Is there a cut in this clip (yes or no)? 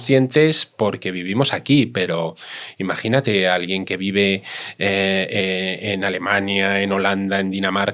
no